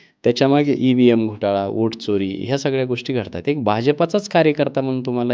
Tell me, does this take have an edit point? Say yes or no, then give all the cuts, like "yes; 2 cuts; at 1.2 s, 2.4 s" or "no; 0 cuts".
no; 0 cuts